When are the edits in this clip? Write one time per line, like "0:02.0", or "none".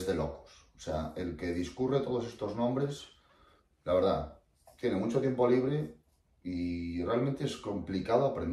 none